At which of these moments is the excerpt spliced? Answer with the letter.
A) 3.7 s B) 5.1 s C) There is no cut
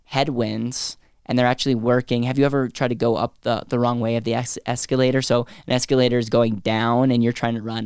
C